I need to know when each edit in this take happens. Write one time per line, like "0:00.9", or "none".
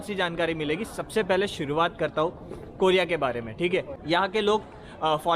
0:03.9